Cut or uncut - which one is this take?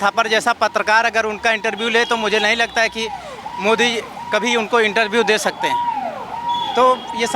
uncut